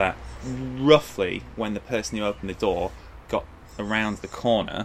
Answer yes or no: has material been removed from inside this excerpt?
no